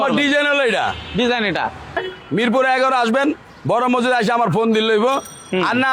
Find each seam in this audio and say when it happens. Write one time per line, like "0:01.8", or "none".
0:02.0